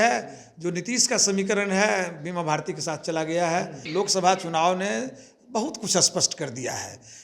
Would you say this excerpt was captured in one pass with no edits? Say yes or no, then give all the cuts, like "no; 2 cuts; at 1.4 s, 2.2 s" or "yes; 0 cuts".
no; 1 cut; at 3.8 s